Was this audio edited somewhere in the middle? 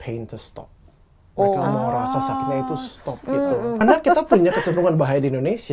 yes; 1 cut; at 3.8 s

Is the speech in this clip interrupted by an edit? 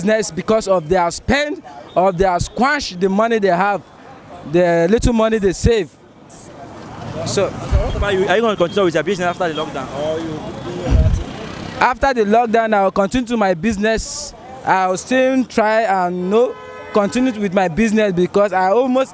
no; 0 cuts

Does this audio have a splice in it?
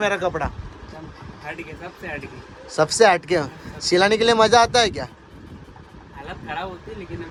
no; 0 cuts

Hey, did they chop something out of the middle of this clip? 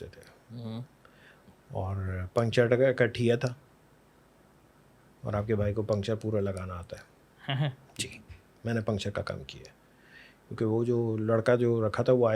no; 0 cuts

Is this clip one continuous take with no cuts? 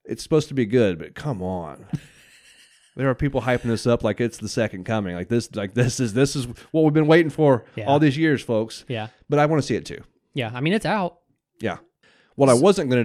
no; 1 cut; at 11.9 s

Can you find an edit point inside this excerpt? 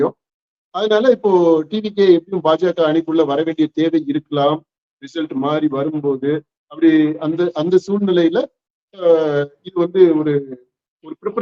no; 0 cuts

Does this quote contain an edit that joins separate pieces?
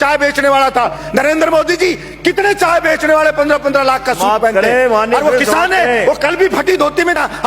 yes; 1 cut; at 1.0 s

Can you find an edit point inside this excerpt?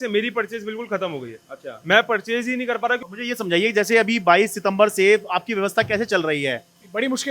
yes; 1 cut; at 3.1 s

